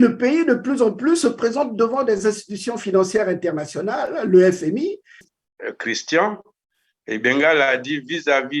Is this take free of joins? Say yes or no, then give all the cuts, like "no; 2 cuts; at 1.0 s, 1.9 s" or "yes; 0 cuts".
no; 1 cut; at 5.2 s